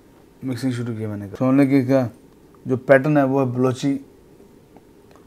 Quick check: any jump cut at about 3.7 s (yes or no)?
no